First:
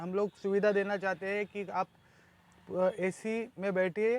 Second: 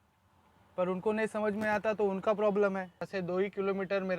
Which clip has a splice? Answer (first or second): second